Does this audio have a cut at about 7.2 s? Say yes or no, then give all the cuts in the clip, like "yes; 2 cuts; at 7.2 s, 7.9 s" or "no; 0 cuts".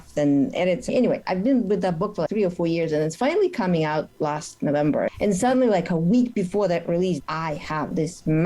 yes; 3 cuts; at 0.9 s, 5.1 s, 7.2 s